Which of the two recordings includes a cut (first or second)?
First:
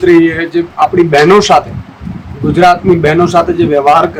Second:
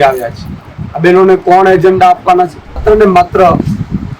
second